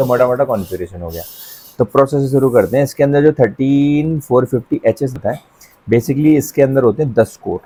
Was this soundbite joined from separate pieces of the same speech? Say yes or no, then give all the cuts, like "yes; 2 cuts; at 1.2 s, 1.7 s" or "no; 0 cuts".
no; 0 cuts